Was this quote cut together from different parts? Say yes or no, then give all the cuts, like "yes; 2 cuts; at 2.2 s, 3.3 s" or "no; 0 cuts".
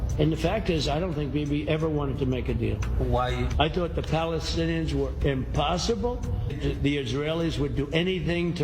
yes; 1 cut; at 6.6 s